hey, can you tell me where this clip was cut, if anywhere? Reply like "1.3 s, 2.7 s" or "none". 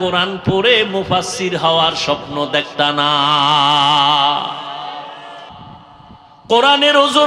5.7 s